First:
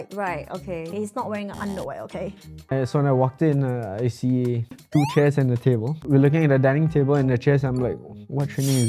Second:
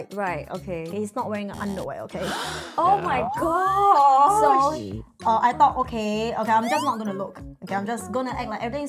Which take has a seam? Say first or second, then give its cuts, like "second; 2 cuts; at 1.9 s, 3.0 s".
first; 3 cuts; at 2.7 s, 4.7 s, 5.9 s